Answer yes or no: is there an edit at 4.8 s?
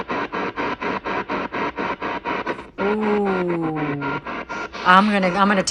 no